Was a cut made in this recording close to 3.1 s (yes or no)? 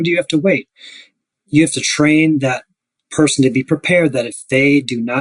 no